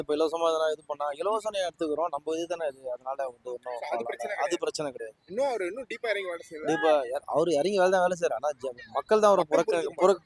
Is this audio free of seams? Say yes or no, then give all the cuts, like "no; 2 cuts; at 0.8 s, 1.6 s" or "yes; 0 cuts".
yes; 0 cuts